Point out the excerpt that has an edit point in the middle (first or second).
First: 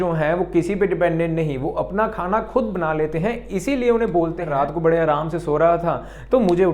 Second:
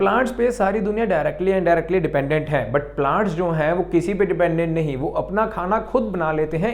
first